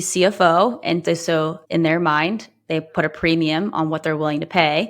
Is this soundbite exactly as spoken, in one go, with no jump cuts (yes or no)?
no